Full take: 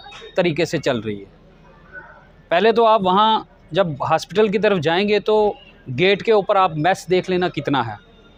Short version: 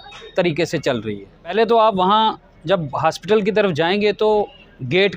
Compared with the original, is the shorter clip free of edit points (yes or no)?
no